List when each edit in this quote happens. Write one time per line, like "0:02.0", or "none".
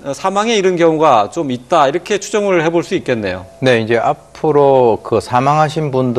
0:01.2